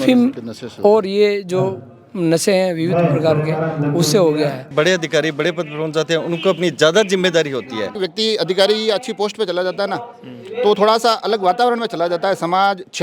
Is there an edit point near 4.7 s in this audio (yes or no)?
yes